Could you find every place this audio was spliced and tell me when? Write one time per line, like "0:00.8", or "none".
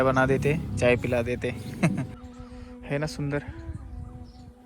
0:02.2